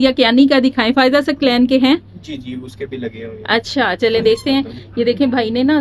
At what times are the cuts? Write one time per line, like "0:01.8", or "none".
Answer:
none